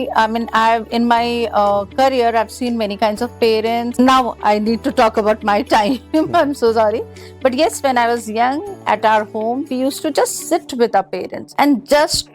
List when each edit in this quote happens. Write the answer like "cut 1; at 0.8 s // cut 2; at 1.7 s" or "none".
cut 1; at 3.9 s